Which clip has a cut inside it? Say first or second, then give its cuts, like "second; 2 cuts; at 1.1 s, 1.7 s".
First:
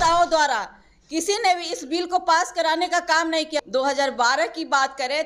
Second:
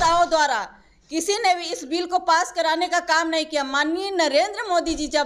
first; 1 cut; at 3.7 s